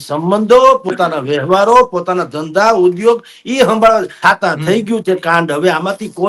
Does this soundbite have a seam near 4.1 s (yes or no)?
yes